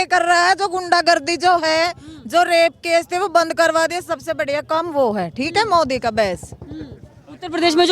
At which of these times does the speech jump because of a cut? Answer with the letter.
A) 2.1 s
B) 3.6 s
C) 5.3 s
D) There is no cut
D